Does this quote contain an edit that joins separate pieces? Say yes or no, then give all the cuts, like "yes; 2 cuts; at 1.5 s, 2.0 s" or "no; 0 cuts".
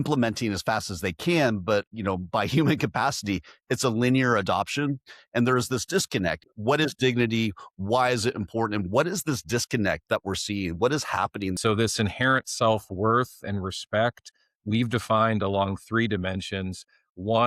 yes; 2 cuts; at 6.4 s, 11.5 s